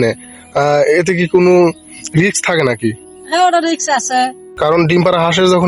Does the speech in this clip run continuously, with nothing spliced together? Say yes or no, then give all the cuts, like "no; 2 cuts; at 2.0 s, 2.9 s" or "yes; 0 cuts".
no; 1 cut; at 4.4 s